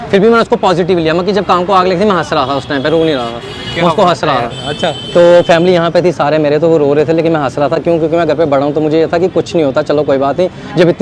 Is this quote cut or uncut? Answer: uncut